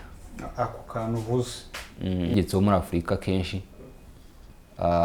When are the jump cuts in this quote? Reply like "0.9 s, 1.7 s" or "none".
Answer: 2.3 s